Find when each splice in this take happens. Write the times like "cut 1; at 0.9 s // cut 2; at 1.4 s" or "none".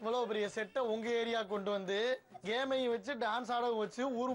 cut 1; at 2.3 s